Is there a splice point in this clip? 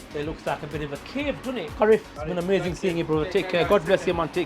yes; 1 cut; at 1.8 s

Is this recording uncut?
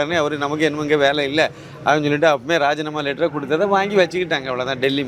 yes; 0 cuts

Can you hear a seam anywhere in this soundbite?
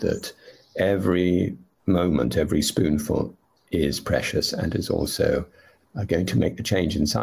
yes; 1 cut; at 1.7 s

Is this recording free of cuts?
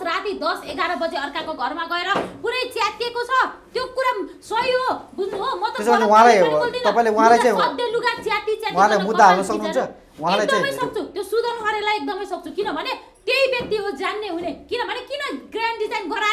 yes; 0 cuts

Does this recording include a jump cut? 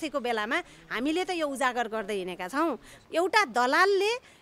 yes; 1 cut; at 2.9 s

